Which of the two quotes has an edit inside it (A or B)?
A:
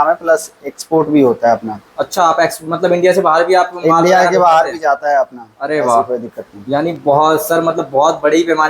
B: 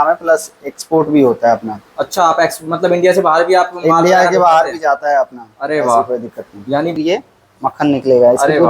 B